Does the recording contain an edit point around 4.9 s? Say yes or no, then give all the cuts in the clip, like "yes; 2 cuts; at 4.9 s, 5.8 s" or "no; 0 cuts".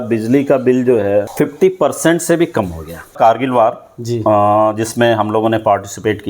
no; 2 cuts; at 1.3 s, 3.2 s